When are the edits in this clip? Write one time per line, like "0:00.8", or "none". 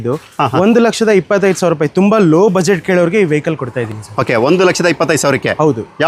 none